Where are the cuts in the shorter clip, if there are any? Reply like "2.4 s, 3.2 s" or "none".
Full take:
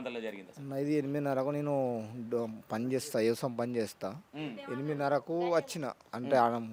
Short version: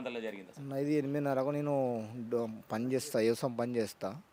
none